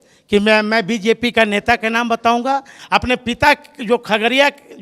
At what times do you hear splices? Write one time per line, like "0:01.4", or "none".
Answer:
0:02.8